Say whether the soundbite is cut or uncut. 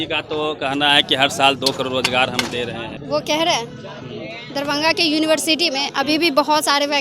cut